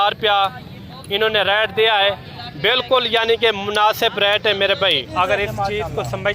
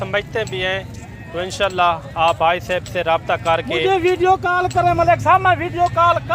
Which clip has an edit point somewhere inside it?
first; 1 cut; at 5.1 s

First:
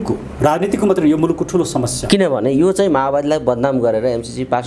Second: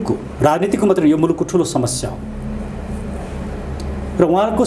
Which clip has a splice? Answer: first; 1 cut; at 2.0 s

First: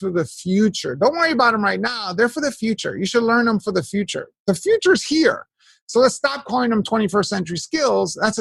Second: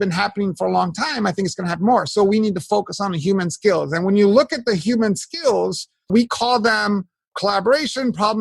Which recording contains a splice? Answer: second; 2 cuts; at 6.1 s, 7.3 s

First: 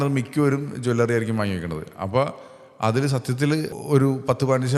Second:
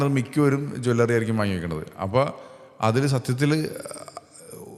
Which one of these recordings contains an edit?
first; 1 cut; at 3.8 s

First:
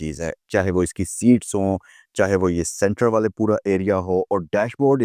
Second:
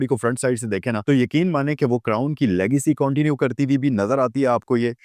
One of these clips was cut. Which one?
second; 1 cut; at 1.0 s

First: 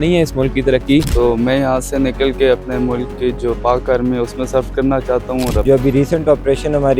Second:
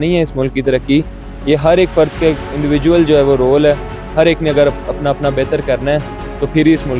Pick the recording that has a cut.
first; 2 cuts; at 1.1 s, 5.6 s

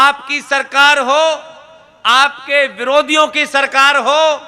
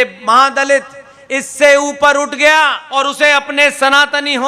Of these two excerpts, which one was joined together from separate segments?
second; 1 cut; at 2.9 s

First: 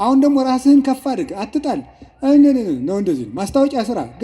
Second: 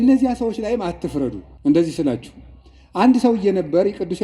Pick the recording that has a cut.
second; 1 cut; at 1.5 s

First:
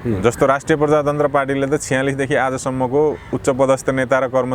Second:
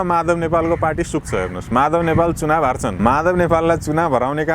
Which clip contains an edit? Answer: second; 1 cut; at 2.9 s

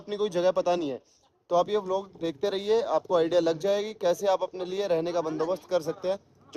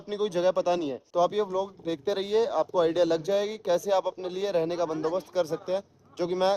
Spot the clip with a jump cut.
second; 1 cut; at 1.0 s

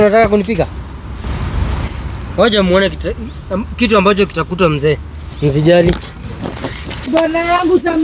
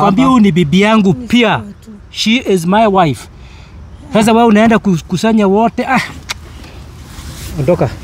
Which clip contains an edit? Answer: first; 2 cuts; at 1.2 s, 7.1 s

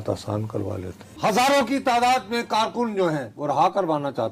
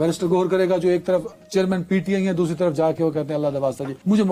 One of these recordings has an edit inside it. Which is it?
first; 2 cuts; at 1.1 s, 3.3 s

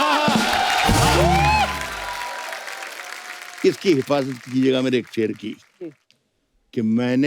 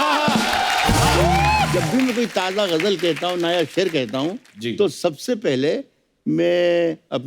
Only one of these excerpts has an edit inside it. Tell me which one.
second; 1 cut; at 1.7 s

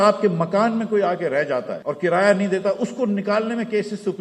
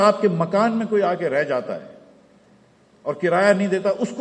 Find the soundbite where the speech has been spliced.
first; 1 cut; at 1.8 s

